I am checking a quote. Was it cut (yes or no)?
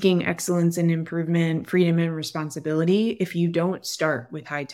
no